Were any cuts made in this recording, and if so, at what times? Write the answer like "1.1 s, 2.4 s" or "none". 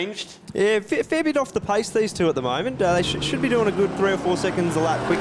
none